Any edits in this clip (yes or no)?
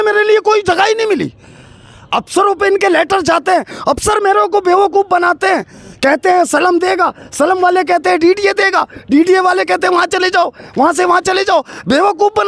no